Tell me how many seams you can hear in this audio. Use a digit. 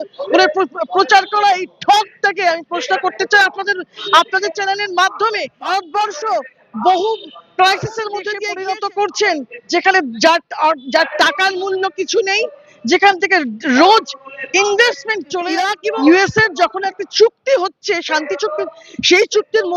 3